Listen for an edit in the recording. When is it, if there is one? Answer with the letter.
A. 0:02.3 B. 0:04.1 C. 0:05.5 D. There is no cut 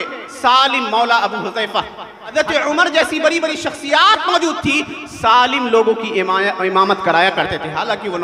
A